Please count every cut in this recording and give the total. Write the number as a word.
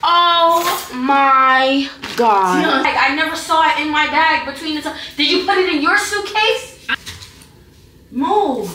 two